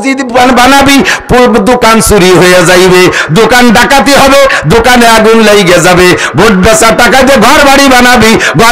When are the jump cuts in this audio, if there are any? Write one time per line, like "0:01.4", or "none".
none